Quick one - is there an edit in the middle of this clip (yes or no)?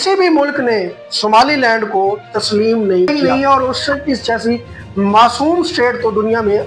yes